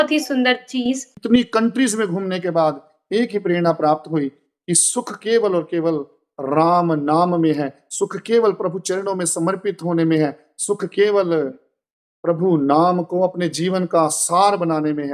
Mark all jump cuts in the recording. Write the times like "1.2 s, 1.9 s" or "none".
1.1 s